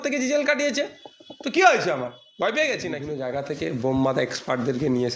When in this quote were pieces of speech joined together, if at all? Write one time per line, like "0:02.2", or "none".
0:03.1